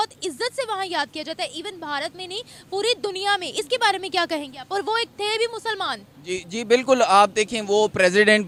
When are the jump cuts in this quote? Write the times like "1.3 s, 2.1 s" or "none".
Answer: none